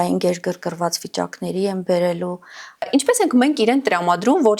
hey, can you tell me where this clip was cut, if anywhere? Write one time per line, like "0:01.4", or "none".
0:02.9